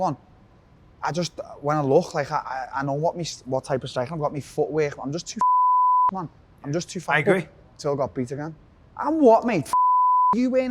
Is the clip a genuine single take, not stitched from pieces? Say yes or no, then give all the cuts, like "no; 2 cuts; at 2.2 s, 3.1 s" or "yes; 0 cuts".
no; 1 cut; at 7.6 s